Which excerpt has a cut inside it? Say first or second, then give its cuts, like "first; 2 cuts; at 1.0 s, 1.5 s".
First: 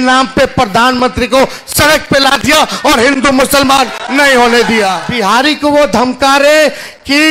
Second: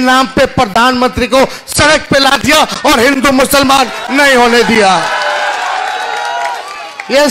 first; 1 cut; at 5.0 s